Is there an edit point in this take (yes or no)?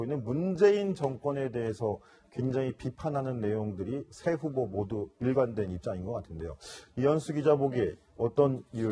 no